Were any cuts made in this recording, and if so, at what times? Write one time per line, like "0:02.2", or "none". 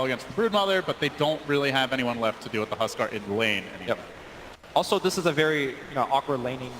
0:03.6